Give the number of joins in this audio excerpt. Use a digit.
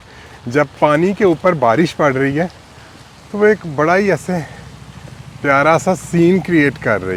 0